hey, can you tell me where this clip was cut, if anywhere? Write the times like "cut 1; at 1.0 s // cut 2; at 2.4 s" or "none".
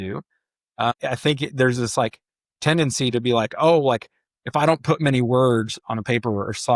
cut 1; at 1.0 s